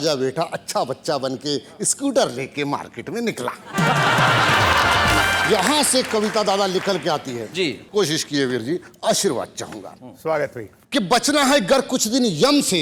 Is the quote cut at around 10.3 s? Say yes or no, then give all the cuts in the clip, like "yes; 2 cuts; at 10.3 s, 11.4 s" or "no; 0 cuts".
no; 0 cuts